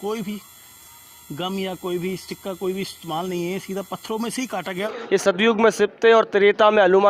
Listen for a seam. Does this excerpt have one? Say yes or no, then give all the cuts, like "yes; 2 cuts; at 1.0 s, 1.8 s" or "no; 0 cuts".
yes; 1 cut; at 4.9 s